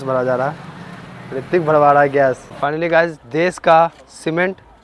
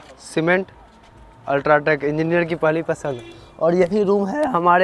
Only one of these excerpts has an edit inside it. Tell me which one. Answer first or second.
first